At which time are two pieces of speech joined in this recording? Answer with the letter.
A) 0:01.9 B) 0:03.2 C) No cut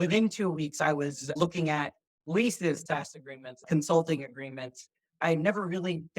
B